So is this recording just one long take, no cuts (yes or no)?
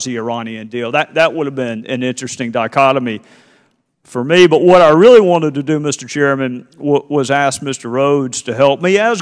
no